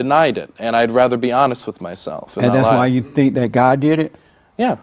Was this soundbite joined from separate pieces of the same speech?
no; 0 cuts

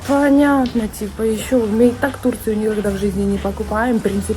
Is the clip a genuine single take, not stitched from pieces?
yes; 0 cuts

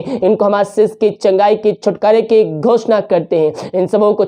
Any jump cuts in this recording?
no; 0 cuts

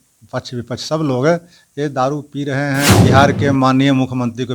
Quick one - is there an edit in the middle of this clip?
yes; 1 cut; at 2.9 s

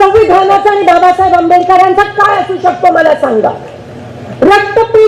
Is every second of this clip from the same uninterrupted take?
yes; 0 cuts

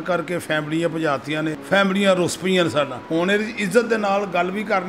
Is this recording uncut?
no; 2 cuts; at 1.6 s, 3.0 s

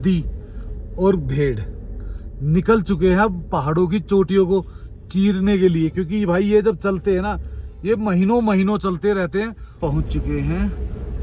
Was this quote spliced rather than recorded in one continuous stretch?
yes; 1 cut; at 9.6 s

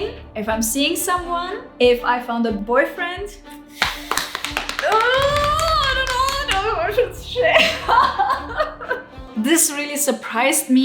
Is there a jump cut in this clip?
yes; 1 cut; at 9.2 s

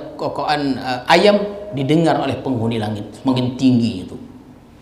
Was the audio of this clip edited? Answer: no; 0 cuts

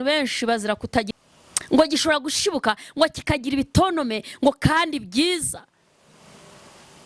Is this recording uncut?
no; 1 cut; at 1.1 s

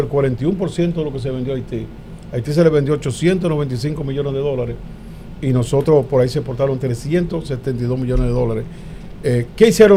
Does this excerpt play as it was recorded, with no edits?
yes; 0 cuts

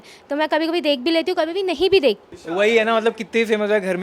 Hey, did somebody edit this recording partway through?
yes; 1 cut; at 2.3 s

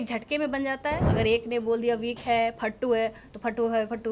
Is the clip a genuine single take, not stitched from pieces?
no; 1 cut; at 1.1 s

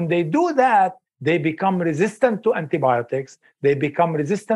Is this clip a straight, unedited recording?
no; 1 cut; at 1.1 s

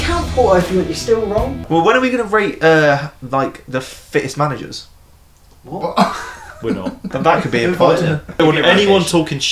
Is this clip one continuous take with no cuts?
no; 2 cuts; at 1.6 s, 8.4 s

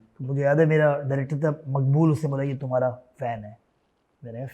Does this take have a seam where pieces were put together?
no; 0 cuts

